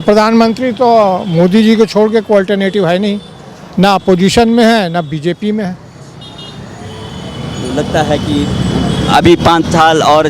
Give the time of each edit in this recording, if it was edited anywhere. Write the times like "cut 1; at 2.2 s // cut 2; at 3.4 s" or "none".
none